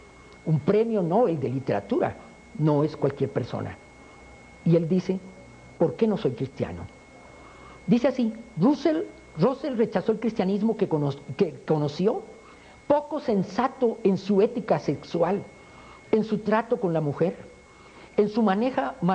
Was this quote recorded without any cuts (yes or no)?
yes